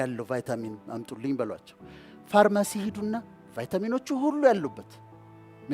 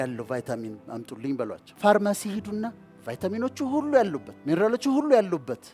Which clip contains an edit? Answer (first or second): second